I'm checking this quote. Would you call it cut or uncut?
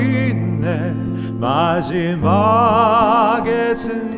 uncut